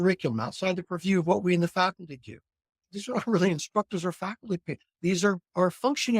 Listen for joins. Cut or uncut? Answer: cut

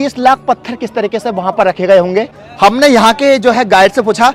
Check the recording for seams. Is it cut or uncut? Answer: uncut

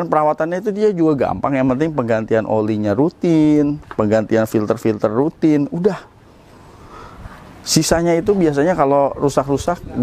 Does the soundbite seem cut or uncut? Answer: uncut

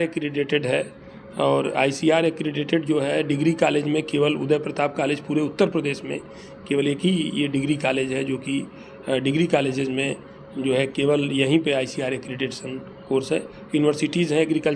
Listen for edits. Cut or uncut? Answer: uncut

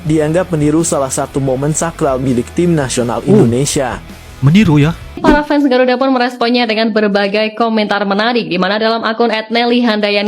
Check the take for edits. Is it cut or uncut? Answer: cut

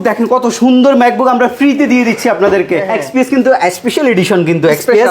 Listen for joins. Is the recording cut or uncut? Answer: cut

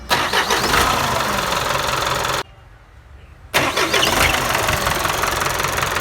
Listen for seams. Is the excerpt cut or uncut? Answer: cut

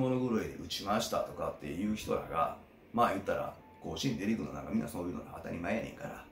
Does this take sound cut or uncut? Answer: uncut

